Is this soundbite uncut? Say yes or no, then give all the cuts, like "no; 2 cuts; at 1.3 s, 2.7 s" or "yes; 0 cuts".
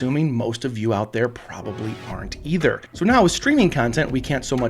no; 1 cut; at 2.9 s